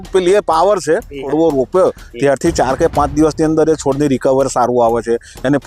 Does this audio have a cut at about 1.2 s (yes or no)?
yes